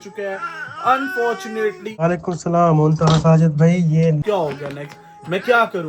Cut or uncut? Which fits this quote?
cut